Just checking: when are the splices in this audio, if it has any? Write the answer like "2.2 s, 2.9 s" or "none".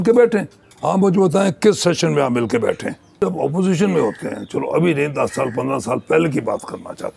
3.2 s